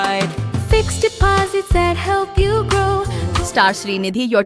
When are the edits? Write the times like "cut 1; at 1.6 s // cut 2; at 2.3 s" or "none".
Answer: cut 1; at 3.2 s